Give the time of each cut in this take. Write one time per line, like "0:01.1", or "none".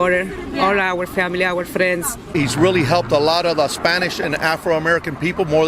0:02.3